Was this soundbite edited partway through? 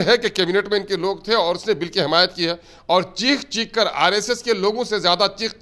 no; 0 cuts

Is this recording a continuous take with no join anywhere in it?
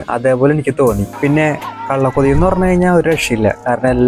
no; 1 cut; at 1.1 s

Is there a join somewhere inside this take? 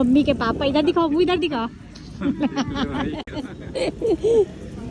no; 0 cuts

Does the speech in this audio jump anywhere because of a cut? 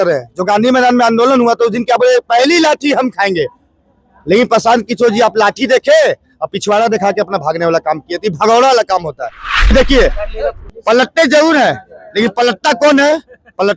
yes; 1 cut; at 9.6 s

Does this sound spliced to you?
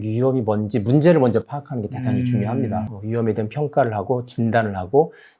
yes; 1 cut; at 2.9 s

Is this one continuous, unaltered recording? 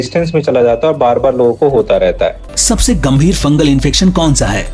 no; 1 cut; at 2.5 s

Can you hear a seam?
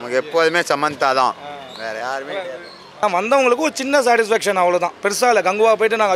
yes; 1 cut; at 3.0 s

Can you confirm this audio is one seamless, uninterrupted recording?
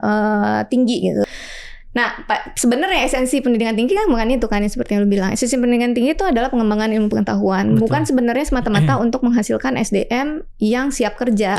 no; 1 cut; at 1.3 s

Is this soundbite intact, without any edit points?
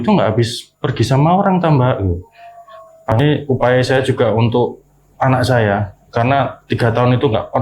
no; 1 cut; at 3.2 s

